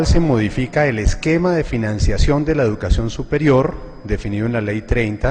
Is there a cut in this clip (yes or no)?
yes